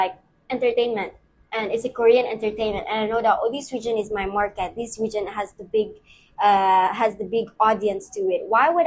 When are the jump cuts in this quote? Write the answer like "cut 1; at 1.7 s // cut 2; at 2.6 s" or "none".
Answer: none